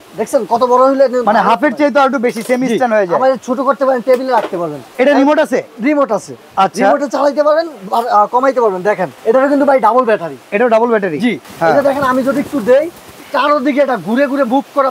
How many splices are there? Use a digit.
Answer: 4